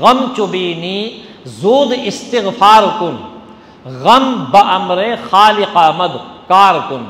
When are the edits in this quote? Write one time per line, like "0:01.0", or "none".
none